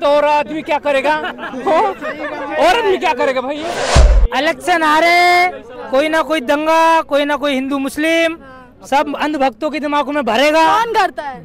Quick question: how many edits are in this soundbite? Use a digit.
1